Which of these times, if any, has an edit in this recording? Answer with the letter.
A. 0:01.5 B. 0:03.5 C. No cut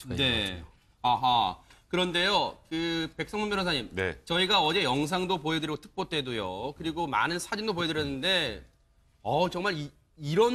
B